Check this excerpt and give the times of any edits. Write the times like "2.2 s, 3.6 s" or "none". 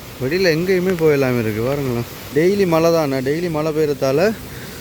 2.1 s